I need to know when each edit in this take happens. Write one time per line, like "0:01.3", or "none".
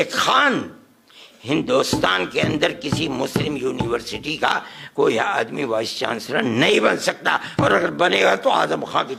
none